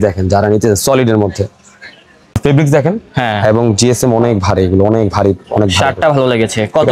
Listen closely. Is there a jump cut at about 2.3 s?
yes; 1 cut; at 2.3 s

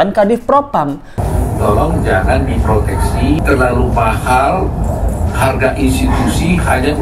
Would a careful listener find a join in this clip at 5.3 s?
no; 2 cuts; at 1.2 s, 3.4 s

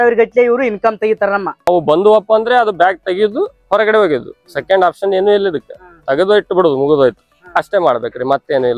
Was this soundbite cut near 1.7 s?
yes; 1 cut; at 1.7 s

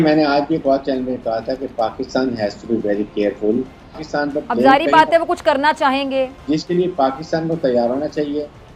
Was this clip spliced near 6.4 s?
yes; 2 cuts; at 4.0 s, 6.4 s

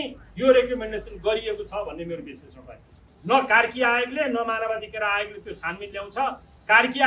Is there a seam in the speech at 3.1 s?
yes; 1 cut; at 3.1 s

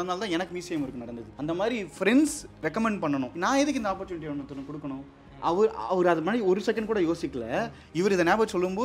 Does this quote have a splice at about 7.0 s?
no; 3 cuts; at 1.3 s, 2.5 s, 3.3 s

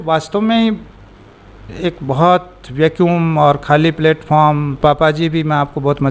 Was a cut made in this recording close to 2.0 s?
no; 1 cut; at 4.8 s

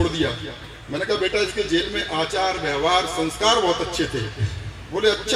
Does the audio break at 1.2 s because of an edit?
no; 0 cuts

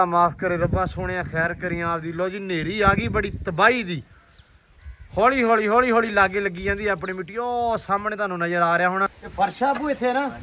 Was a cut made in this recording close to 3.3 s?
no; 1 cut; at 9.2 s

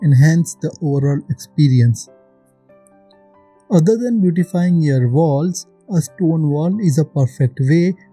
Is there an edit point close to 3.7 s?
yes; 2 cuts; at 2.0 s, 3.7 s

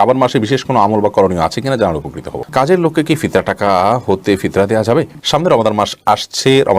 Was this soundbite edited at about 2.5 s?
yes; 2 cuts; at 2.5 s, 5.2 s

